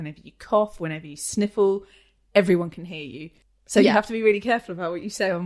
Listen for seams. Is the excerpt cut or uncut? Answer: uncut